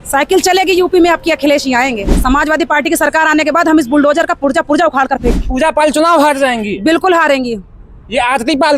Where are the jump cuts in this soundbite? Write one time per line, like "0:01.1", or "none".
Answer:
0:02.1
0:05.4